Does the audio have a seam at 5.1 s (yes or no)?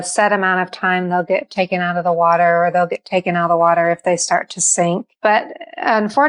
yes